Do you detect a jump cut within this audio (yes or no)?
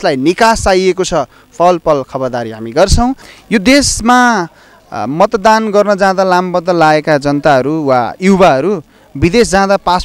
yes